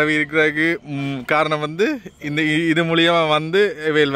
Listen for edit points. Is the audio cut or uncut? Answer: uncut